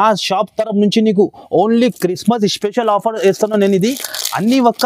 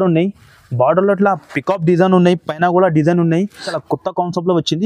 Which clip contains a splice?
second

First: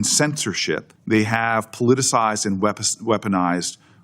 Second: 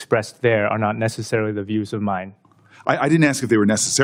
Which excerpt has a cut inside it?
first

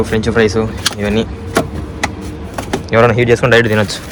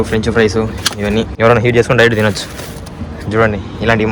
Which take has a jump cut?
second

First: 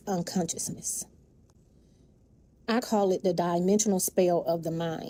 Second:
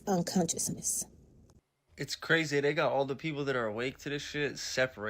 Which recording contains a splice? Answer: second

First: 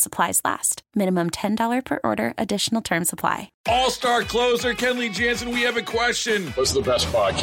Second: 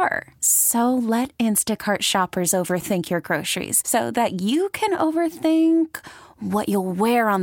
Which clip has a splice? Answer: first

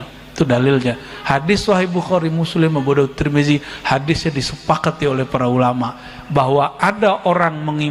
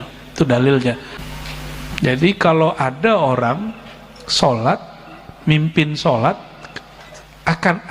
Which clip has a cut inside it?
second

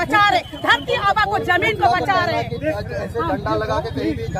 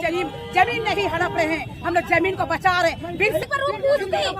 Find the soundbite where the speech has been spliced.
second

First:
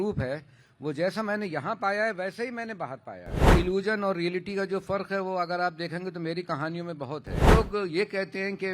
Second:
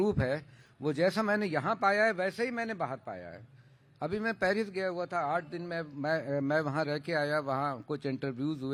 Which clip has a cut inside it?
first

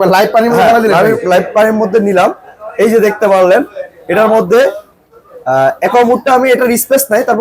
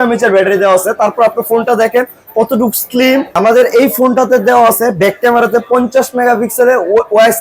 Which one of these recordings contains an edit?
second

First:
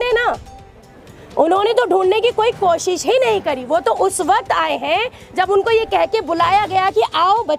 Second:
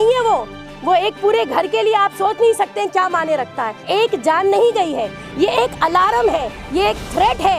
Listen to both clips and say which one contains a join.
second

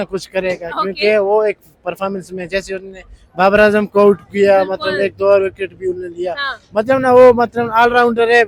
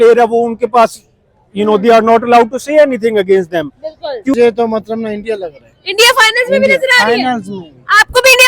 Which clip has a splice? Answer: second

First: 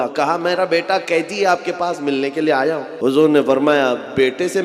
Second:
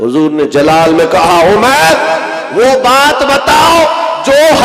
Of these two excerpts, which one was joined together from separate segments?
first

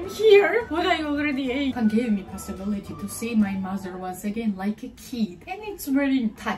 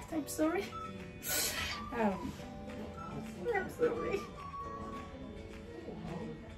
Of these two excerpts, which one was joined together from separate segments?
first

